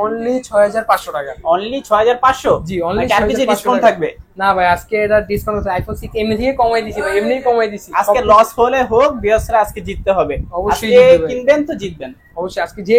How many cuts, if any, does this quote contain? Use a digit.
0